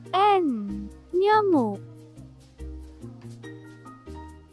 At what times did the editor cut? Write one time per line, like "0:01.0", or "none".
0:01.8